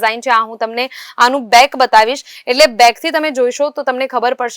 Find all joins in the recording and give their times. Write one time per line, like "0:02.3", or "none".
none